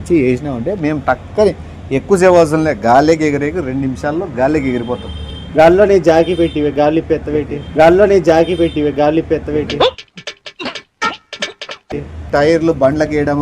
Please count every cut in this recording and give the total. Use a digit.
4